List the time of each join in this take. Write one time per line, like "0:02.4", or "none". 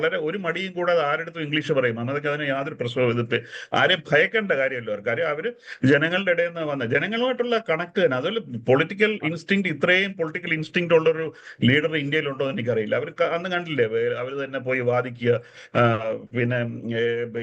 none

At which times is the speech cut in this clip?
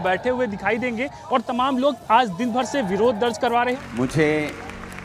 0:03.7

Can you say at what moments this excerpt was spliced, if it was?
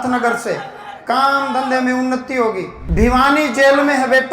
0:02.7

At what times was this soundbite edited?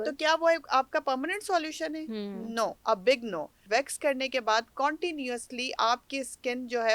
0:03.6

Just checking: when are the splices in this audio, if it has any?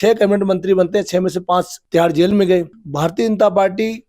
0:01.8
0:02.8

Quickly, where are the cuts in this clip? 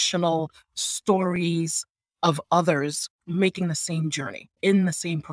0:03.2
0:04.6

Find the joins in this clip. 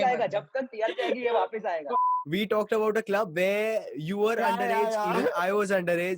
0:01.9

